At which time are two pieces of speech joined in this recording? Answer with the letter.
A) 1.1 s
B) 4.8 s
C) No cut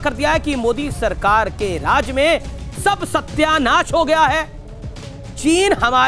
C